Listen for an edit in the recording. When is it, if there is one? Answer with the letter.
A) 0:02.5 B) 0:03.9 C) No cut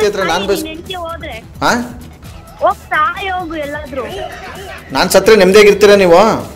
C